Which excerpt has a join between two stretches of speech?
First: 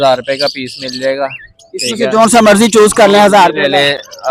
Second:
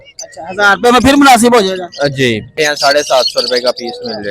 second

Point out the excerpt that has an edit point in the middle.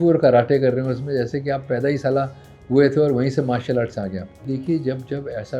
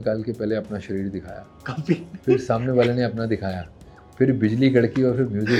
first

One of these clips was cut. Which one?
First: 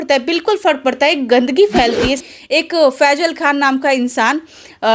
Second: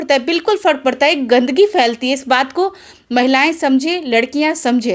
first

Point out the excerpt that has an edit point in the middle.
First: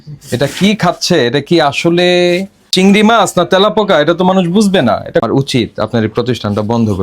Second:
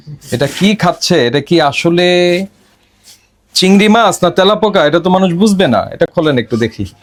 first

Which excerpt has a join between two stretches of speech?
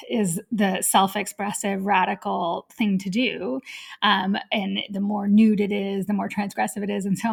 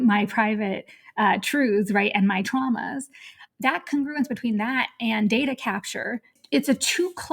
second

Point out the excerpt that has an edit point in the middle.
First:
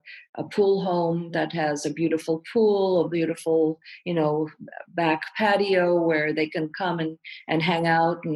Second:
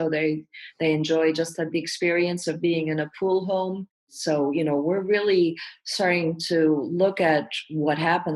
second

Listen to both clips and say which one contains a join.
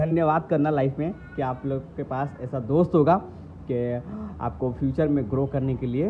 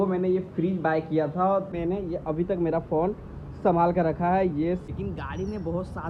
second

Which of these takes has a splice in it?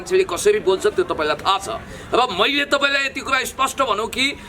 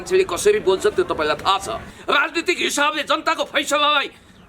second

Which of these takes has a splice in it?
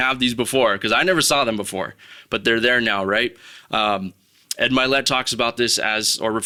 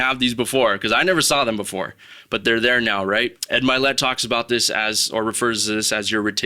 second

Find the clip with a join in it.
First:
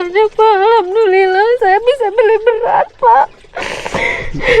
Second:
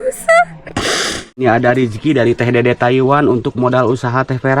second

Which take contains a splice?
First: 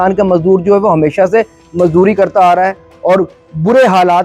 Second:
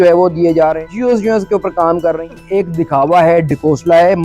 second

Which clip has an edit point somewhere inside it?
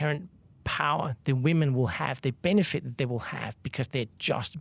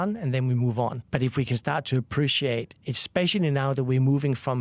second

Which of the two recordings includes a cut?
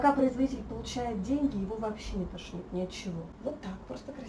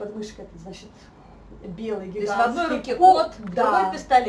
first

